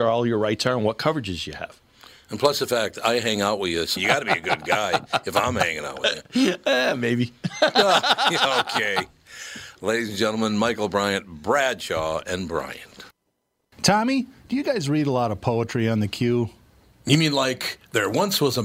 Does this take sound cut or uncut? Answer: cut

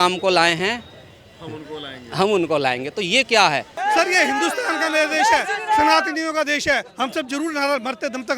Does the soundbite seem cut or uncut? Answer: cut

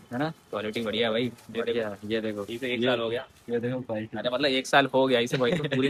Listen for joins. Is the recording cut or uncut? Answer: uncut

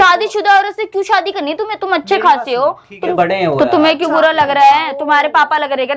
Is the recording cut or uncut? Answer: cut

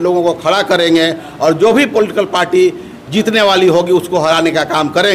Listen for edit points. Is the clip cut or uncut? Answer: uncut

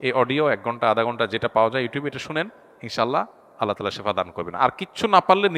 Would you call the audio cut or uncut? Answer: uncut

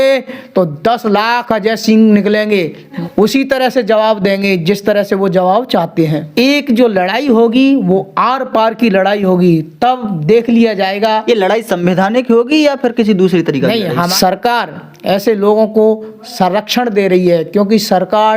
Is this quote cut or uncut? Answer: cut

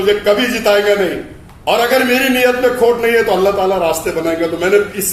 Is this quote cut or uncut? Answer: uncut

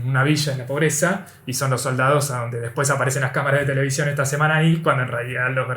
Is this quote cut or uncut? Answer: uncut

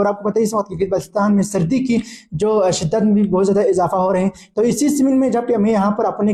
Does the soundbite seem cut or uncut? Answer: uncut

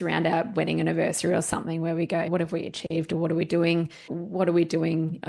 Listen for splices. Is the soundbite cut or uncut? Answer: cut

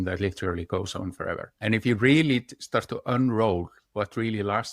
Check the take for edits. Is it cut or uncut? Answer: cut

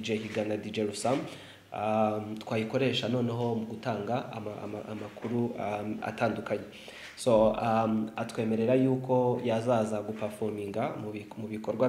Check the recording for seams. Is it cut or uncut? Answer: uncut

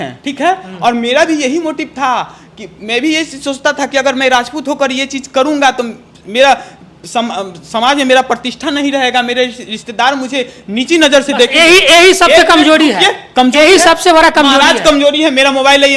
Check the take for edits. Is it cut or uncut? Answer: uncut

